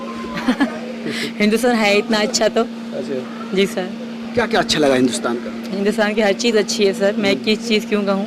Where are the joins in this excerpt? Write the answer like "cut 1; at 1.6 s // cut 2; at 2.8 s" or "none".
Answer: none